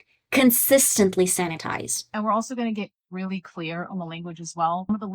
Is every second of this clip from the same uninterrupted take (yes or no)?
no